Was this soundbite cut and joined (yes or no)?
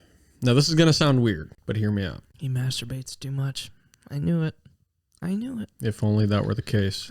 yes